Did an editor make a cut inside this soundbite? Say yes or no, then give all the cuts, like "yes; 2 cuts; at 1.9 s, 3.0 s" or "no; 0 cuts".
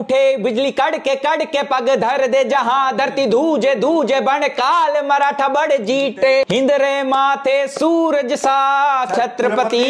yes; 1 cut; at 6.5 s